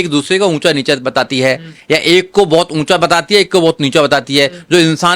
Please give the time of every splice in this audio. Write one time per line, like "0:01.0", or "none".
none